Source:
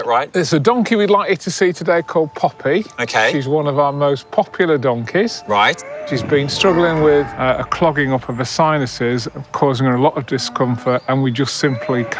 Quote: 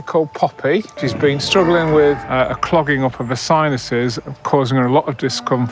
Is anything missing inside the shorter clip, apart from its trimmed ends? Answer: yes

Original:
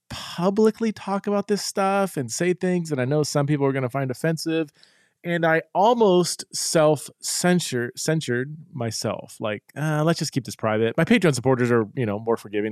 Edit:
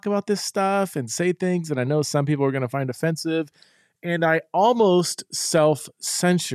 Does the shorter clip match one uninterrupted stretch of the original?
yes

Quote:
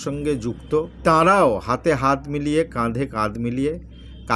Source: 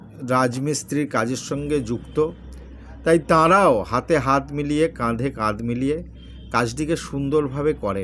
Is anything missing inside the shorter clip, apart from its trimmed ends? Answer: yes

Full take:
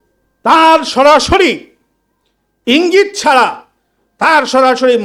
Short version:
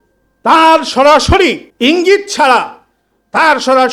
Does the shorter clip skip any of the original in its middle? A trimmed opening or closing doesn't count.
yes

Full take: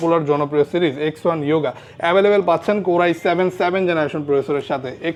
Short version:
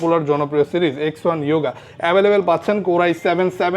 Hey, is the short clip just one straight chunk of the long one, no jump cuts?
yes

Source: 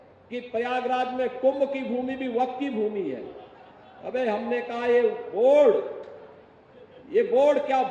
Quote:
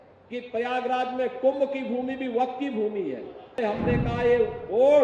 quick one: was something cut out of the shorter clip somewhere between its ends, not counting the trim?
yes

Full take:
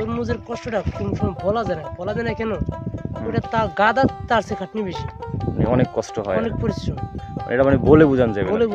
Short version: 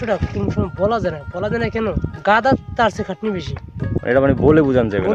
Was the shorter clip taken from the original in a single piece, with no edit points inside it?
no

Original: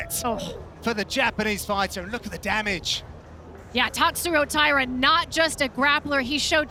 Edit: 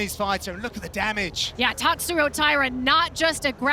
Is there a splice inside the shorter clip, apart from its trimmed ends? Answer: yes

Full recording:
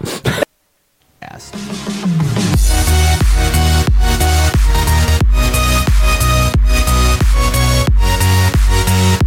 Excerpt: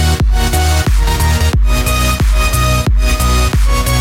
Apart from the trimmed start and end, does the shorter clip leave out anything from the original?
no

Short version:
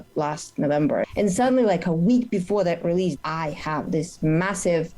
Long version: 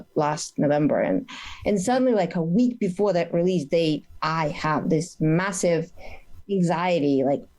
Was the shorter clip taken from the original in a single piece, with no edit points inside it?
no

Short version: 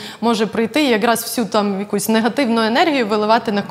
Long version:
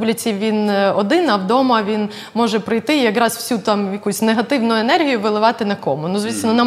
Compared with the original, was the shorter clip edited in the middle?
no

